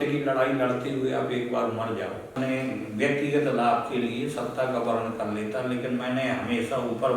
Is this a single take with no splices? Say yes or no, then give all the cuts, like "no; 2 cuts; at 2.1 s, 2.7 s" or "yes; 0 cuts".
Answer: no; 1 cut; at 2.4 s